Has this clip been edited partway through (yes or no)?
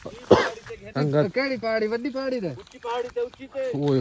yes